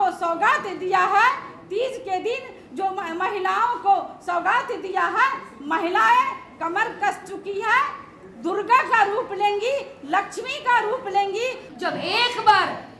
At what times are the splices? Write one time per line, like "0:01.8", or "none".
0:11.7